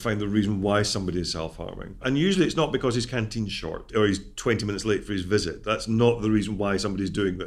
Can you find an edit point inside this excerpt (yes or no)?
yes